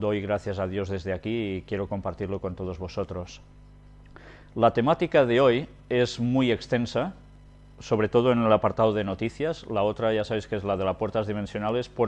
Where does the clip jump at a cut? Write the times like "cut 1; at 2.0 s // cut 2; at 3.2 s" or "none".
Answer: cut 1; at 8.1 s